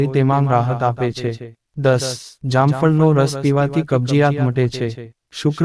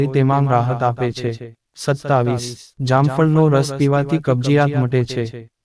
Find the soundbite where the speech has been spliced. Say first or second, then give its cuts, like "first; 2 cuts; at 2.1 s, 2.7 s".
first; 1 cut; at 2.0 s